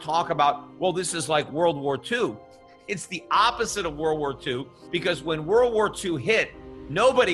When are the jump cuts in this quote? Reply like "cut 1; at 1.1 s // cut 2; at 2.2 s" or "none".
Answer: cut 1; at 4.7 s